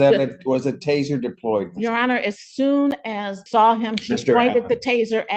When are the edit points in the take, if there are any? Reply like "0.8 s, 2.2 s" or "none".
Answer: 3.4 s